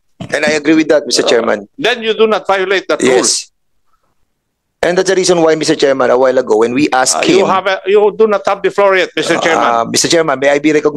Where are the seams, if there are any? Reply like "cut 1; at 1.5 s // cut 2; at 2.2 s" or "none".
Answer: none